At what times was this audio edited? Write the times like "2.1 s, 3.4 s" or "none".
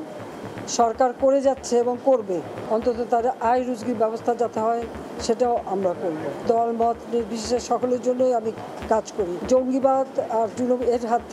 2.5 s, 6.4 s, 9.4 s